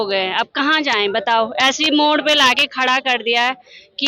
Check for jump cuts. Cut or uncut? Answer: uncut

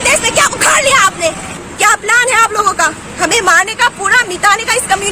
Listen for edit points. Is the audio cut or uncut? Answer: cut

